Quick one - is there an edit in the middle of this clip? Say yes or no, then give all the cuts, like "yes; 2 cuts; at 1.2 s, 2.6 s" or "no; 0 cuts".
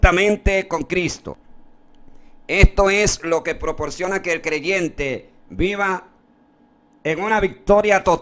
no; 0 cuts